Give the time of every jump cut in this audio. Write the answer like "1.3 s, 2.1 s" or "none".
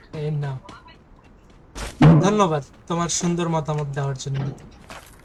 none